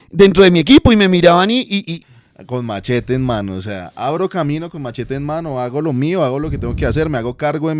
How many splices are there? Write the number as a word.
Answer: one